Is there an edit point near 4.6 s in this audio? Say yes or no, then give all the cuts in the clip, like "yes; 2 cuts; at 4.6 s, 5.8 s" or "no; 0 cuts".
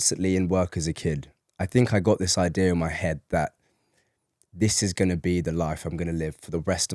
no; 0 cuts